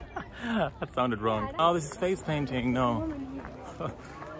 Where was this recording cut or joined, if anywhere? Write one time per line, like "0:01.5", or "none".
0:01.5

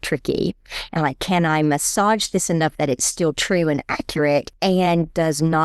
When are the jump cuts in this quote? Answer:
0:04.5

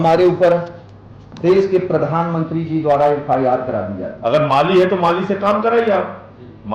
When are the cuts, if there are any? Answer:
0:04.1

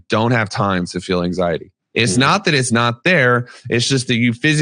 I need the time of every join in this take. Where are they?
0:01.8

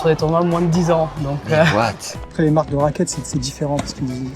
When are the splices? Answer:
0:02.1

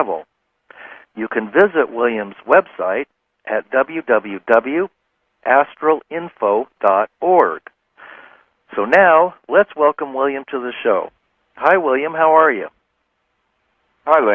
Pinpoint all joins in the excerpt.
0:03.3

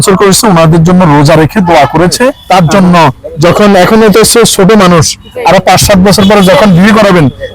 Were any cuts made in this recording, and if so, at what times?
0:02.4

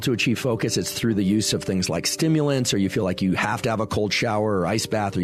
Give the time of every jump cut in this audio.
none

